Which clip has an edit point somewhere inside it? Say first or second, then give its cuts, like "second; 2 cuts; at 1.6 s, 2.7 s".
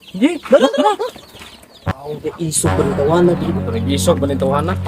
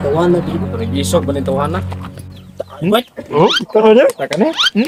first; 1 cut; at 1.9 s